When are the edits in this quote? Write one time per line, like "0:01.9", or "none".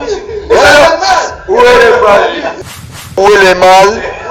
0:02.6